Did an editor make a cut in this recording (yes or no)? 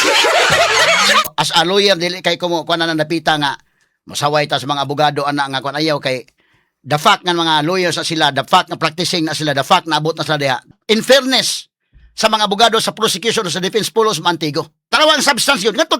yes